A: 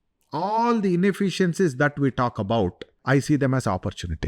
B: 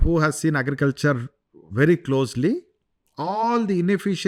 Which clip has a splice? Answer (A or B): A